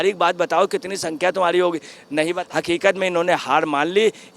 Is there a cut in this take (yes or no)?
yes